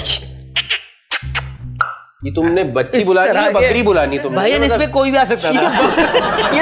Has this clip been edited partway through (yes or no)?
no